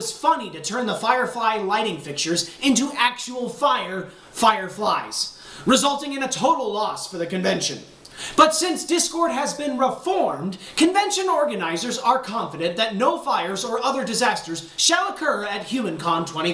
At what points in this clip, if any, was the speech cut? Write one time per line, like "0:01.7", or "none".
0:10.9